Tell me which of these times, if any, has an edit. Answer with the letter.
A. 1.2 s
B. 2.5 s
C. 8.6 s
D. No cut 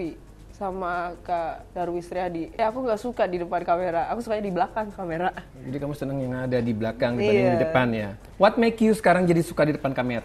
B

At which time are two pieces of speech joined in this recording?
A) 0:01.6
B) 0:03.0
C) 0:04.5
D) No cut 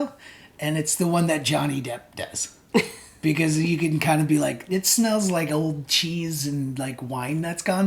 D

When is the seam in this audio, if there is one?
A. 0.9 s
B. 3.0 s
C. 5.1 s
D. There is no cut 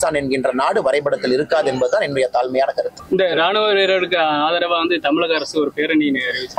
B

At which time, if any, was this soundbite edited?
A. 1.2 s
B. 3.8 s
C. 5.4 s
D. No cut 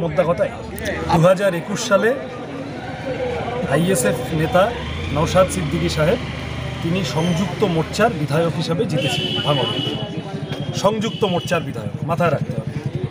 A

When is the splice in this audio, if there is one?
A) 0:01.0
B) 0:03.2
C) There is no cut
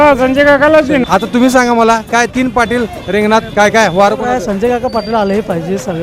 A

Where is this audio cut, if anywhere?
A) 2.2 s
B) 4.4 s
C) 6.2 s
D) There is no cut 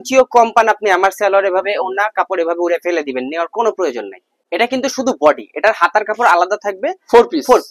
B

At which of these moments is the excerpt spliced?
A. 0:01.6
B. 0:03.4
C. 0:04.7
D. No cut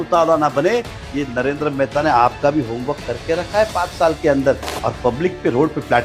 C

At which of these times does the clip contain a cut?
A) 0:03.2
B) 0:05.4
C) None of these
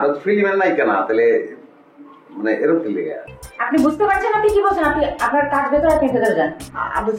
A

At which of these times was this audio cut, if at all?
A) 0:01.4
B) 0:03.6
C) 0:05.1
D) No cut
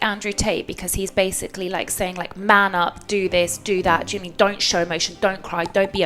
D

